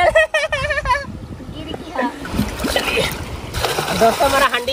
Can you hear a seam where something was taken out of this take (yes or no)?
yes